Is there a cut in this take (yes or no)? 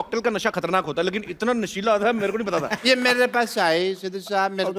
yes